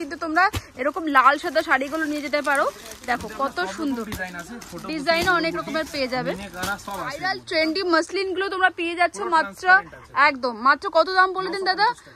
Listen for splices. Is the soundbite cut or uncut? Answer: cut